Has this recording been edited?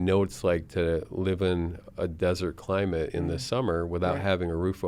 no; 0 cuts

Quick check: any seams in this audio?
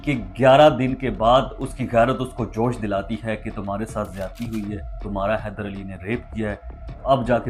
no; 0 cuts

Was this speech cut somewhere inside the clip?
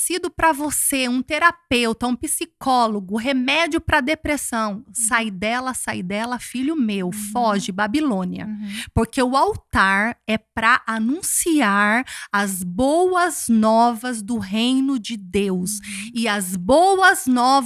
no; 0 cuts

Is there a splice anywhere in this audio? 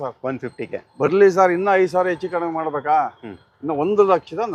no; 0 cuts

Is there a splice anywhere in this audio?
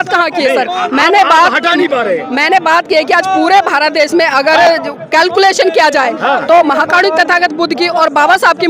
no; 0 cuts

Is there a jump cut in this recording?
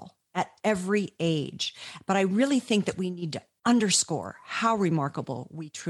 no; 0 cuts

